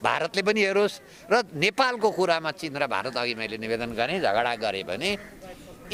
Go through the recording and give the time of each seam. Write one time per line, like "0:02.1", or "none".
none